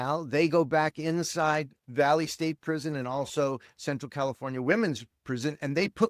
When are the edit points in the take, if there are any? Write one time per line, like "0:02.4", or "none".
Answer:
none